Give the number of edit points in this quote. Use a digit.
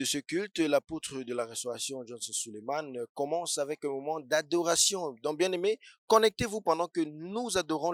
0